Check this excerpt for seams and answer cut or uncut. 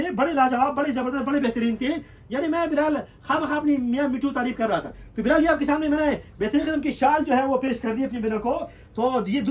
uncut